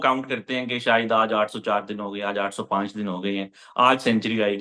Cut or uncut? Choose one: uncut